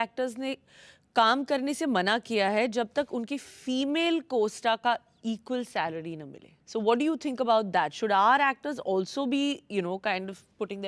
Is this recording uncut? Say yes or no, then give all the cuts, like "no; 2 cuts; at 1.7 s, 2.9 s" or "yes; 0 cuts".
yes; 0 cuts